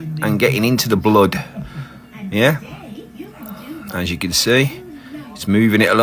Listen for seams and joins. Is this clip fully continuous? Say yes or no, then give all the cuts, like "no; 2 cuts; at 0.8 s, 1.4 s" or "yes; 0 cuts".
yes; 0 cuts